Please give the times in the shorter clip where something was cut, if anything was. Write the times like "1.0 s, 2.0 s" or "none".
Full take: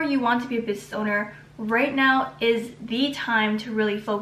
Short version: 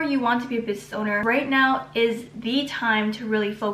1.2 s